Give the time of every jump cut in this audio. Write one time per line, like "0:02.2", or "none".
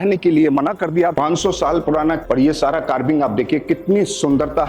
0:01.2
0:02.2